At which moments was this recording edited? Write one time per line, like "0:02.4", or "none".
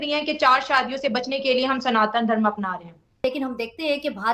0:03.2